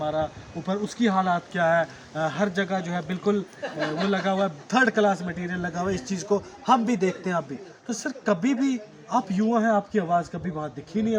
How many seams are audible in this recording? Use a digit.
0